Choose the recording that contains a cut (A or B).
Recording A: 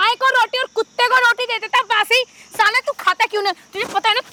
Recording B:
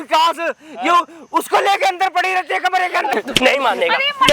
B